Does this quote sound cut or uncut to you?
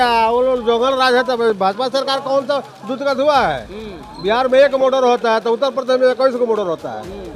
uncut